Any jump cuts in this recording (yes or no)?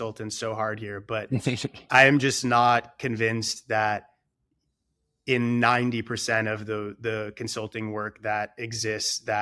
no